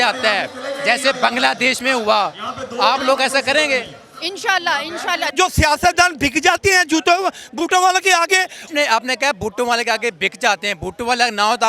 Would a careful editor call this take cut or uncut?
cut